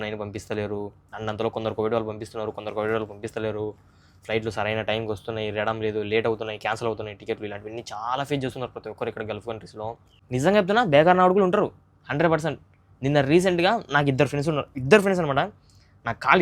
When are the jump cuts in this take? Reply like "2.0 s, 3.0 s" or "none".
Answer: 10.2 s